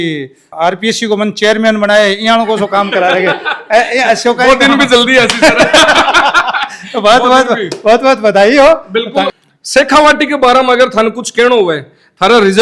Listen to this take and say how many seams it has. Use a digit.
0